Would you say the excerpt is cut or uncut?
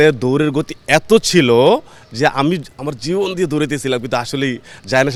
uncut